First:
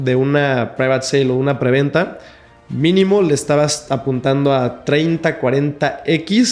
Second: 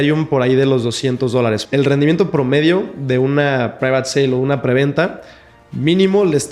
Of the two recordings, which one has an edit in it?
second; 1 cut; at 1.6 s

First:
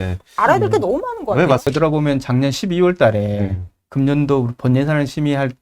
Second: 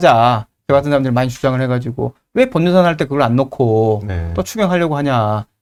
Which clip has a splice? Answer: first; 1 cut; at 1.7 s

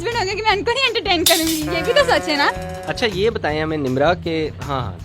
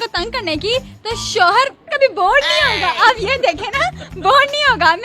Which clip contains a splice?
first; 1 cut; at 2.7 s

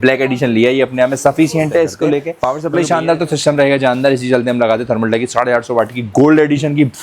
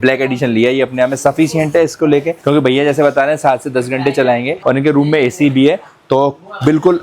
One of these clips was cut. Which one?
first; 1 cut; at 2.4 s

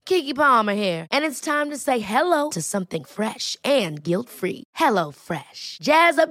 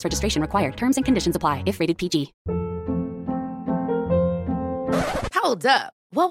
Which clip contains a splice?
second; 1 cut; at 2.4 s

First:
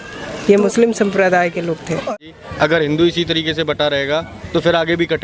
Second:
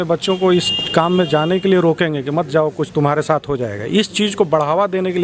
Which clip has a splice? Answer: first; 1 cut; at 2.1 s

